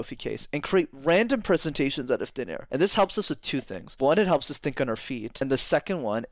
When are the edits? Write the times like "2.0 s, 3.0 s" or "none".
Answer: 2.6 s, 3.8 s, 5.3 s